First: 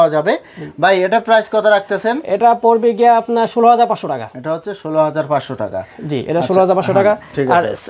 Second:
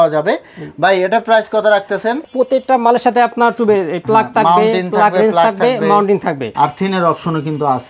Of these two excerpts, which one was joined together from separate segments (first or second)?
second